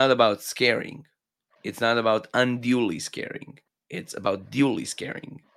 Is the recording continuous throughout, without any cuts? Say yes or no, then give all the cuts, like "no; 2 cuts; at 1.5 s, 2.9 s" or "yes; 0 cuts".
yes; 0 cuts